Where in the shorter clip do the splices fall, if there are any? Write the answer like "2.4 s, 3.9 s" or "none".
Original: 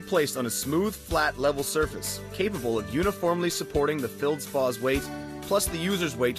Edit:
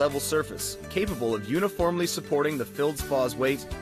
none